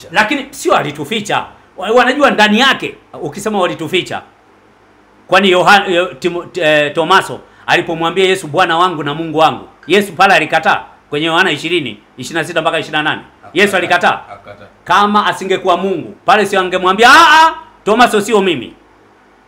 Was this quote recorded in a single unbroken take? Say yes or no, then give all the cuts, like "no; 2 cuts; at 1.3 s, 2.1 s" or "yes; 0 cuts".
yes; 0 cuts